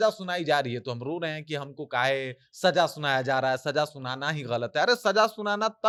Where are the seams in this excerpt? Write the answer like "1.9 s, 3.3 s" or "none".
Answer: none